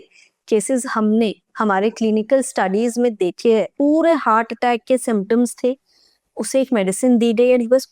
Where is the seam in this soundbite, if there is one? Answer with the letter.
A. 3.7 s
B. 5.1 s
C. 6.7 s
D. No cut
A